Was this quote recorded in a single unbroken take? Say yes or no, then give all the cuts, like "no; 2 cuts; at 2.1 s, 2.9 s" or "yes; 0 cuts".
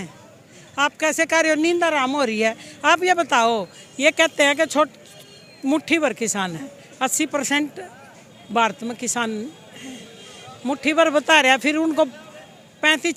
yes; 0 cuts